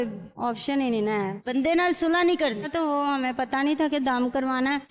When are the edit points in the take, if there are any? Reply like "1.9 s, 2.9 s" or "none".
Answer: 2.7 s